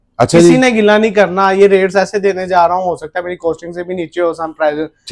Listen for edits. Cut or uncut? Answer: uncut